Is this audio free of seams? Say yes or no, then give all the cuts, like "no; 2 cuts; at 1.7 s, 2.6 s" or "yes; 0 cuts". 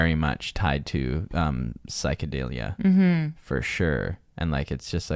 yes; 0 cuts